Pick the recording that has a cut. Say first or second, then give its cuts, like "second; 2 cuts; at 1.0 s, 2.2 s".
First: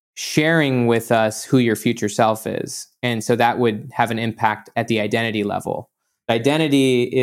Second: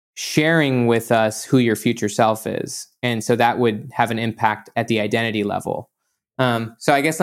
first; 1 cut; at 6.3 s